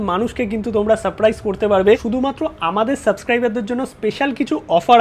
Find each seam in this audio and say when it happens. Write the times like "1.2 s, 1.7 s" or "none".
2.0 s